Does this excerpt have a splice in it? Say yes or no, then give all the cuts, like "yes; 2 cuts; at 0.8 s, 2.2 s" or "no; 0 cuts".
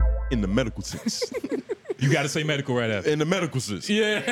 no; 0 cuts